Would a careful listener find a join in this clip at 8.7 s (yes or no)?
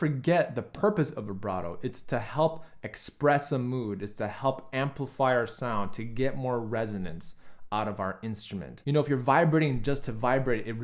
yes